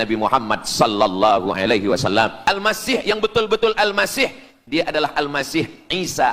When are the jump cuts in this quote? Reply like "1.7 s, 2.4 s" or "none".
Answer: 2.4 s